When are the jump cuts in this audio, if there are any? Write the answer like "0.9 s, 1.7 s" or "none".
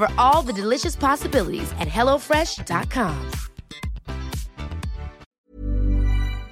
5.2 s